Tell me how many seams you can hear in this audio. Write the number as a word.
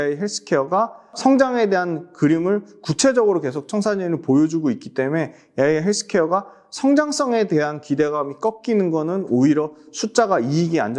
zero